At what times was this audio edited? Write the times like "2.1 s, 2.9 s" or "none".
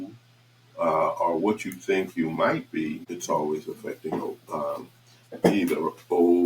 3.1 s